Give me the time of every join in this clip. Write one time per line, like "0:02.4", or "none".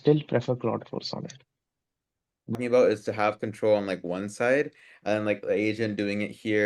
0:02.5